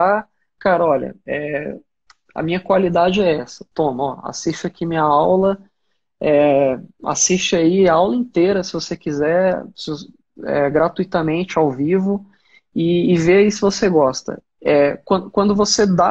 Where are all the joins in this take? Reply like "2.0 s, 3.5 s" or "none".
none